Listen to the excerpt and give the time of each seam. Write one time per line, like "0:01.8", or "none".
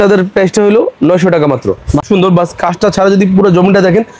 0:02.0

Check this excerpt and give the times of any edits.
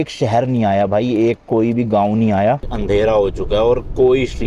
0:02.8

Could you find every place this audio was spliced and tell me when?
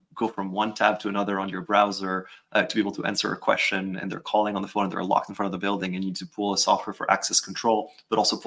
none

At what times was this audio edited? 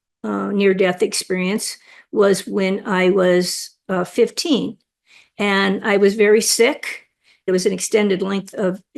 0:07.5

